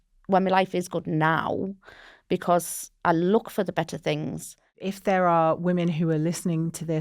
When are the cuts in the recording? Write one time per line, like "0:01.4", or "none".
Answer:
0:02.8
0:04.9